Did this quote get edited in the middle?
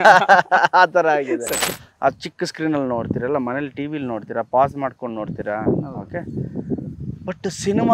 yes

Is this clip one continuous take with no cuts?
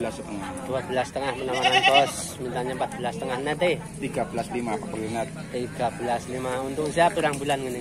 yes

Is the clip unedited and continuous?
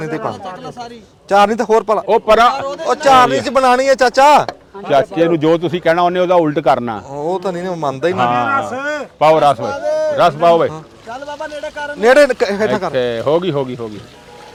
yes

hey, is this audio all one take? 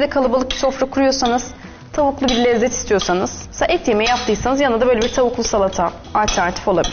no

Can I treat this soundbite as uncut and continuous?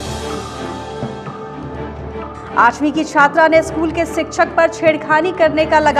yes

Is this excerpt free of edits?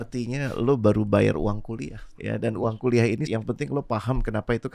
no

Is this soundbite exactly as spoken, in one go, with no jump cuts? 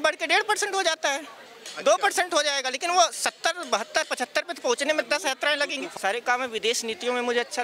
no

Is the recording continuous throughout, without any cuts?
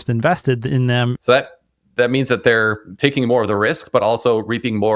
no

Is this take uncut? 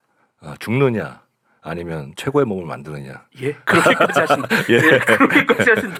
yes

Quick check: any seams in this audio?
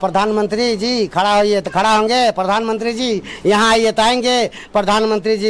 no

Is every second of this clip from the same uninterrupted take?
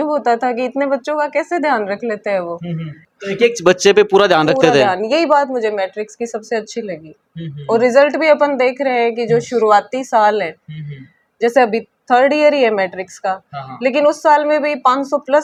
yes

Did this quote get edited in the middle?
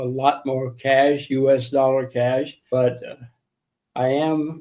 yes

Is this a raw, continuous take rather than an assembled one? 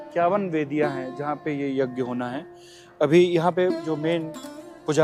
yes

